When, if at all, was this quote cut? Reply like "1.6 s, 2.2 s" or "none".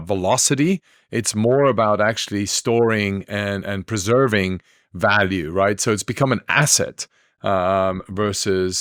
none